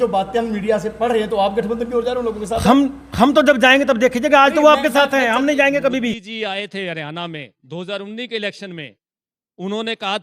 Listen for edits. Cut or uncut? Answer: cut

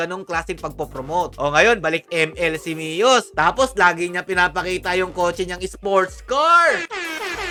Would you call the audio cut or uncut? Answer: uncut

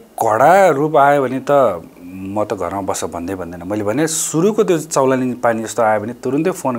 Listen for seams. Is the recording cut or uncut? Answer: uncut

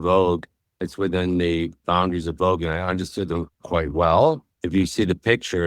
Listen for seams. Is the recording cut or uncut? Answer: uncut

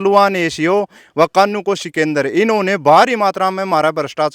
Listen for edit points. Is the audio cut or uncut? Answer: uncut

